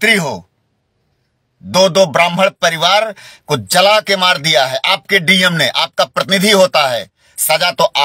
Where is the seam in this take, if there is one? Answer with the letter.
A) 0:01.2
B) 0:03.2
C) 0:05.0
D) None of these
D